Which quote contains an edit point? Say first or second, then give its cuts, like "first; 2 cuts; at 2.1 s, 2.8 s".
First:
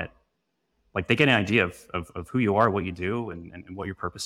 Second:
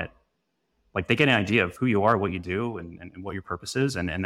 second; 1 cut; at 1.7 s